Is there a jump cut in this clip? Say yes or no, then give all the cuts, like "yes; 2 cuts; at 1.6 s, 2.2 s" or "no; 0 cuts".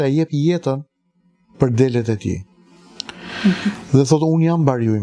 no; 0 cuts